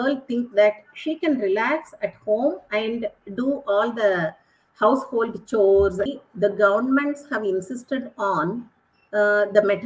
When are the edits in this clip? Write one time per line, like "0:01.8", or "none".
0:06.1